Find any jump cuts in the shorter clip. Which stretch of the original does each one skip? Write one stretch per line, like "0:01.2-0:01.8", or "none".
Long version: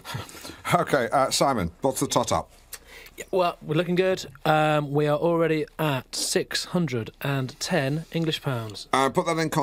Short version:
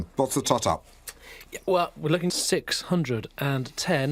0:03.9-0:06.1